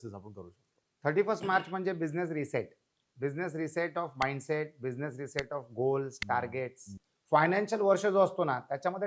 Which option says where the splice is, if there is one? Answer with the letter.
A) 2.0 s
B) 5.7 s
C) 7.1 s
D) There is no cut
C